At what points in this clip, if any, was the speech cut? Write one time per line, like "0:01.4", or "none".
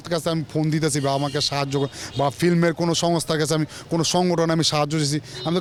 none